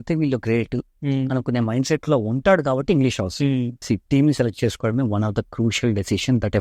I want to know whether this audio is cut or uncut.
cut